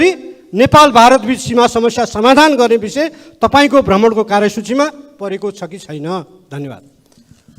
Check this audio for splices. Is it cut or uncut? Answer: uncut